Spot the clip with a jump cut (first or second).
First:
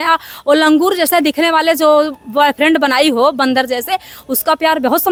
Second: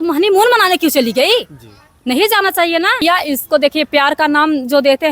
second